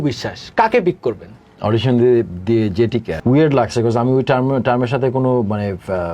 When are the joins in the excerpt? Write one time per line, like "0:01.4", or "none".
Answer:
0:03.1